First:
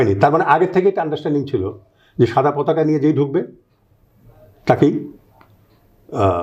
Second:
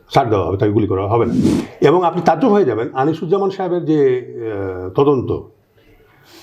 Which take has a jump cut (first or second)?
second